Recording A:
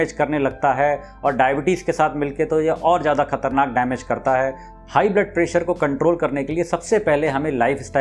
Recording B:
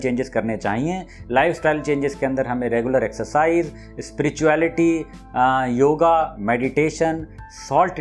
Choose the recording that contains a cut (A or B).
A